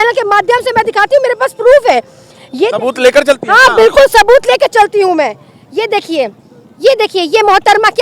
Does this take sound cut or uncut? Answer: uncut